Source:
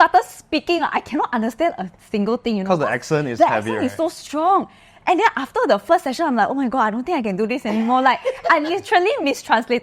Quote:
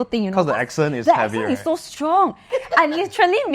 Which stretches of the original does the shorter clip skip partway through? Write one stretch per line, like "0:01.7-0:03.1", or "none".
0:04.9-0:08.3